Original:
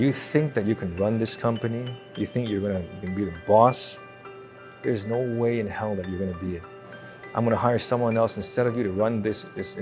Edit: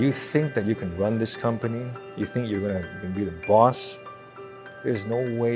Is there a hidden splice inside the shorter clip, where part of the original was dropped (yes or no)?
no